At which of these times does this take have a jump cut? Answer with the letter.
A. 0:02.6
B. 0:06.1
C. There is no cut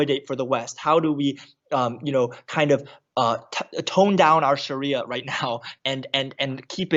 C